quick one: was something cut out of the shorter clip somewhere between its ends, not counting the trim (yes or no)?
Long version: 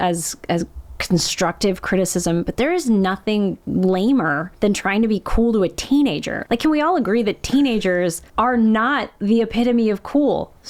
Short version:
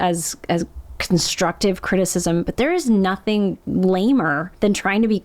no